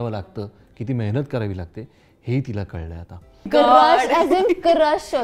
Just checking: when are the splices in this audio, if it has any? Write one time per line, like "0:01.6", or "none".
0:03.5

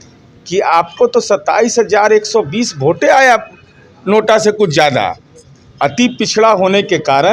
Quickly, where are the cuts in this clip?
none

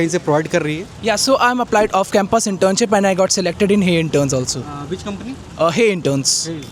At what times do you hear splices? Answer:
none

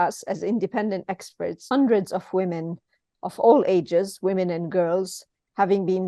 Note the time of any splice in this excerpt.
0:01.6

